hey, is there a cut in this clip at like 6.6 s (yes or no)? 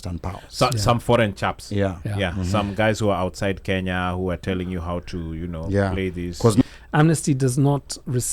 yes